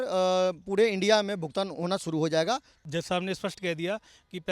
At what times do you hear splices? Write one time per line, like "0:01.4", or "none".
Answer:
0:02.7